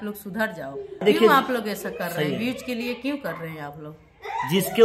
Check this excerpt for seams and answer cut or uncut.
cut